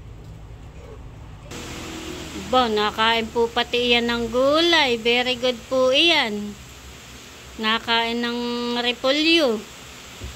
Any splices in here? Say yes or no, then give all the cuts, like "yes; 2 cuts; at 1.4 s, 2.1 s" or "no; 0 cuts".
yes; 1 cut; at 1.5 s